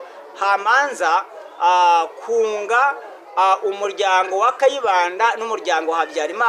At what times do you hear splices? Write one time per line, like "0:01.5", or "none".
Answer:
none